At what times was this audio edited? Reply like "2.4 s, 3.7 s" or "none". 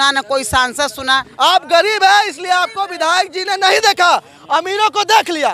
1.2 s